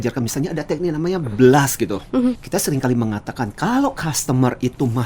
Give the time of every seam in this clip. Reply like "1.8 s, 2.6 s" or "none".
2.4 s